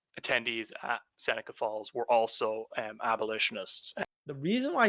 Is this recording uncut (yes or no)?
no